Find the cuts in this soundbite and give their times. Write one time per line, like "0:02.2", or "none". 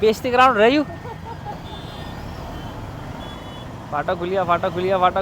none